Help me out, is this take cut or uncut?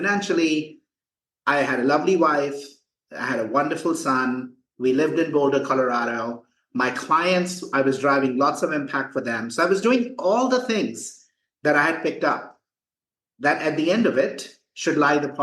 uncut